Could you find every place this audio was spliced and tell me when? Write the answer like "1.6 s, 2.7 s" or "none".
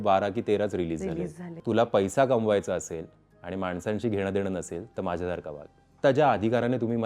1.6 s, 5.9 s